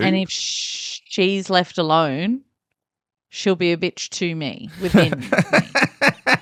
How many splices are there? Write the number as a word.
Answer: zero